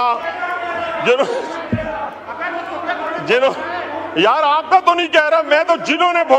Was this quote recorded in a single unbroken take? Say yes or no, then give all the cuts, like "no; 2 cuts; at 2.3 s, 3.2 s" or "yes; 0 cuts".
yes; 0 cuts